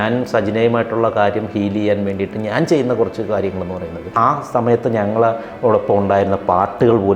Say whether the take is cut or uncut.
cut